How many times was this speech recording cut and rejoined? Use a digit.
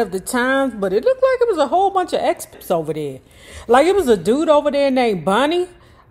1